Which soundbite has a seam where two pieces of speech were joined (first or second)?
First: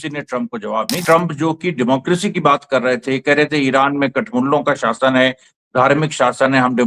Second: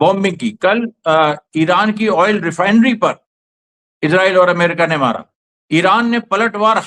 first